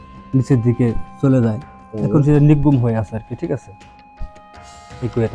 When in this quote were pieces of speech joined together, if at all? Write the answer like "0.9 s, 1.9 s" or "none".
none